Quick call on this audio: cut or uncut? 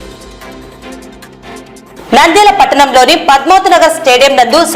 cut